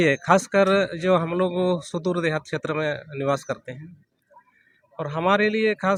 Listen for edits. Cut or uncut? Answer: uncut